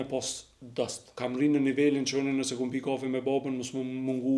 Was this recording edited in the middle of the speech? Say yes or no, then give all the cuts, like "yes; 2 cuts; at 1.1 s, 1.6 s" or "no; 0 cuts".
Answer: yes; 1 cut; at 1.0 s